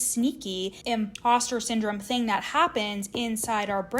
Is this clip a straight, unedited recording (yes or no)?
no